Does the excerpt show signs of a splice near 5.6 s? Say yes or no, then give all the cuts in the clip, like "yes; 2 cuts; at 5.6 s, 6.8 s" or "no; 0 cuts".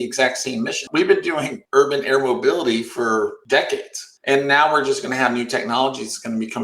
no; 3 cuts; at 0.9 s, 1.6 s, 3.6 s